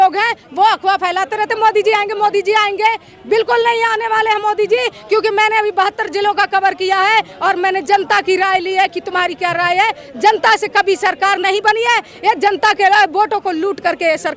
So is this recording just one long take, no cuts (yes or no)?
yes